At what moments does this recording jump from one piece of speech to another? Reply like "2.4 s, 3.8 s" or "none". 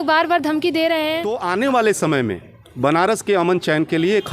1.4 s